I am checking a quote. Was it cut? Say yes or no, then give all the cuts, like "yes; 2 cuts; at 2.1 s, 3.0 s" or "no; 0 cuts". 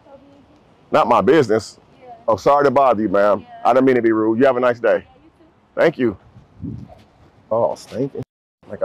yes; 2 cuts; at 2.3 s, 7.5 s